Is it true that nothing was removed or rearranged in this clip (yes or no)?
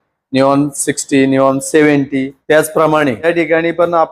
no